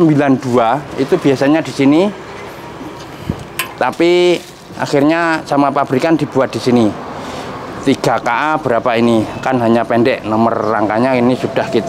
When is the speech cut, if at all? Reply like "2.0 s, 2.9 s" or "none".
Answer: none

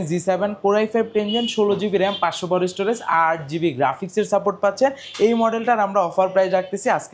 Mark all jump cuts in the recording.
none

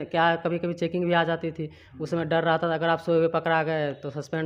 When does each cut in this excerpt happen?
none

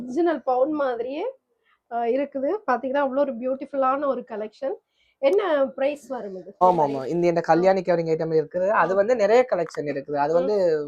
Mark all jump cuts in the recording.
6.5 s

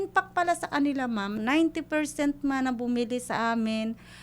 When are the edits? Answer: 1.4 s

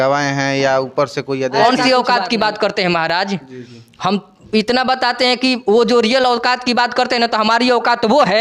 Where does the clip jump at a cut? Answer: 1.6 s

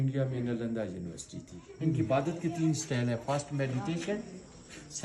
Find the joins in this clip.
1.6 s

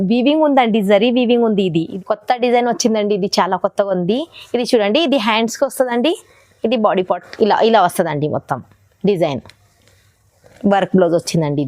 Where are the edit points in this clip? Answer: 1.9 s

